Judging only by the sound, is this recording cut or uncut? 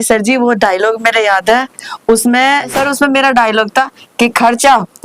cut